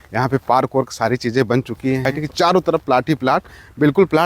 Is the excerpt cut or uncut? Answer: cut